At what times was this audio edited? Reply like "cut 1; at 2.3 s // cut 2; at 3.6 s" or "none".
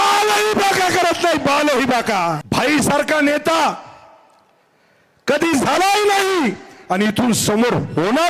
cut 1; at 2.4 s